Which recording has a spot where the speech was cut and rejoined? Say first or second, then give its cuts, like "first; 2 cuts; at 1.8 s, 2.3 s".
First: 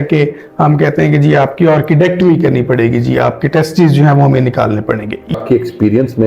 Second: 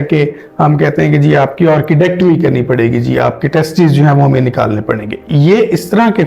first; 1 cut; at 5.4 s